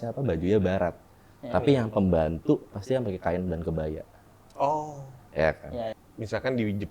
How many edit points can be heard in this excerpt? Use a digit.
1